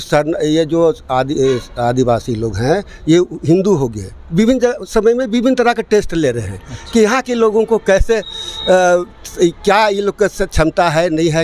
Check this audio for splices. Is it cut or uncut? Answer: uncut